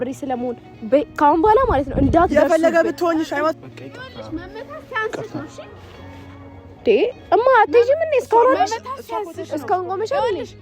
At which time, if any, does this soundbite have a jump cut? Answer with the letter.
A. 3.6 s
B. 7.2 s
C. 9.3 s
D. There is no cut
A